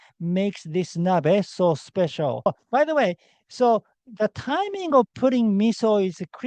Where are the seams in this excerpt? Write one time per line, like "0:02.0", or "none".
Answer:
0:02.5